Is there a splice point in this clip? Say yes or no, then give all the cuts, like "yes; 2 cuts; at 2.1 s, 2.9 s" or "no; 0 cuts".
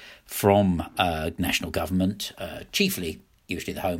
no; 0 cuts